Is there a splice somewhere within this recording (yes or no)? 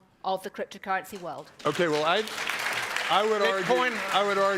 no